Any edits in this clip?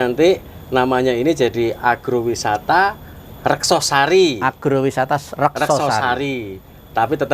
no; 0 cuts

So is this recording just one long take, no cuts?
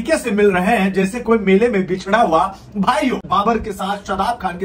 no; 1 cut; at 3.2 s

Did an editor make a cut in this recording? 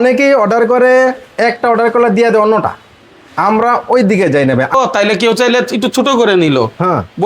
yes; 1 cut; at 4.7 s

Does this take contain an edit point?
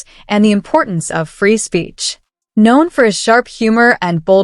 no; 0 cuts

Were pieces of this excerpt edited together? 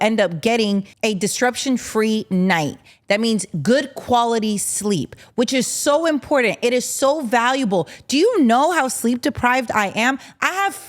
yes; 1 cut; at 0.9 s

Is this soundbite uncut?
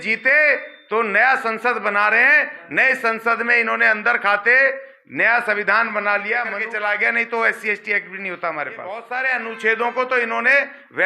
no; 2 cuts; at 6.6 s, 9.1 s

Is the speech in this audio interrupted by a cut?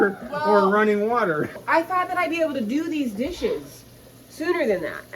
yes; 1 cut; at 1.6 s

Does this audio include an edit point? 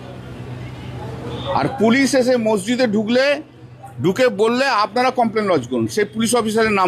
no; 0 cuts

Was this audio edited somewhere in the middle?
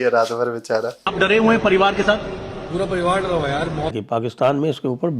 yes; 2 cuts; at 1.1 s, 3.9 s

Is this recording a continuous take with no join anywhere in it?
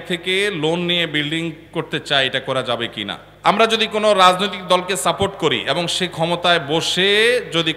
no; 2 cuts; at 1.6 s, 3.2 s

